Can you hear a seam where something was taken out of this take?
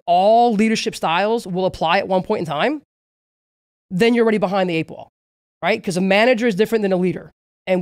no; 0 cuts

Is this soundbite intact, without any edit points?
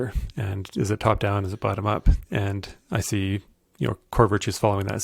yes; 0 cuts

